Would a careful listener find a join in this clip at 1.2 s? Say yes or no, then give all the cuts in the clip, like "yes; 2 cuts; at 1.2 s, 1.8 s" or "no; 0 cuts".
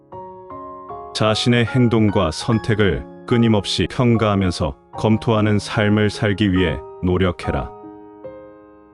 yes; 2 cuts; at 1.2 s, 7.6 s